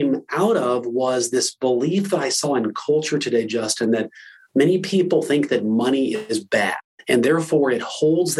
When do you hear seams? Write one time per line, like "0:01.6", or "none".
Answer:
0:06.9